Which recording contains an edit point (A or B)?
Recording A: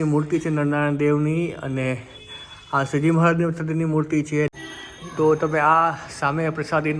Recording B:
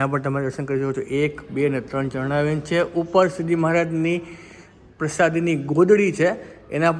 A